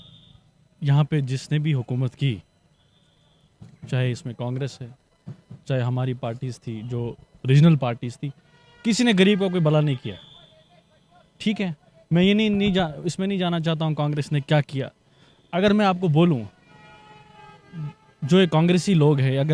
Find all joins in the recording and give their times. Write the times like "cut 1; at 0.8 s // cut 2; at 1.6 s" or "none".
none

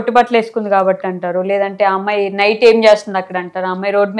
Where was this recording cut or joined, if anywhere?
none

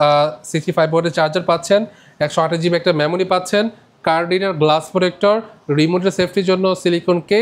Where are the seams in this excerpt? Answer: none

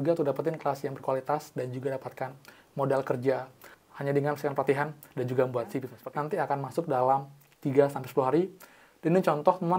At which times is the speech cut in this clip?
cut 1; at 5.9 s

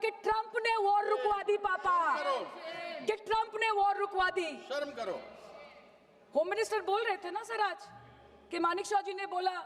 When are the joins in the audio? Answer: none

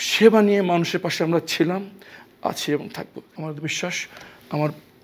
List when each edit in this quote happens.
cut 1; at 3.2 s

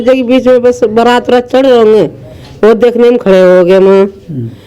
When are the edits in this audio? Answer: none

